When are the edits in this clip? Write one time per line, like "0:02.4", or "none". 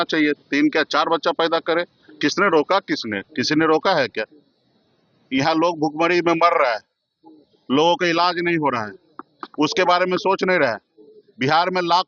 none